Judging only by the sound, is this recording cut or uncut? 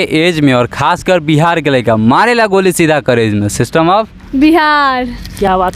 uncut